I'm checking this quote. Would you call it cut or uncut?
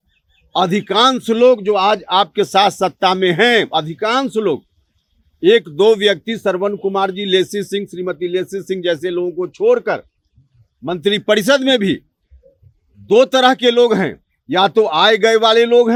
uncut